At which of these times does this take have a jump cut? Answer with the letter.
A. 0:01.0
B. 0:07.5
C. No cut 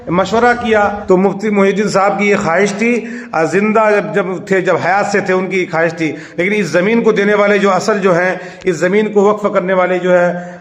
A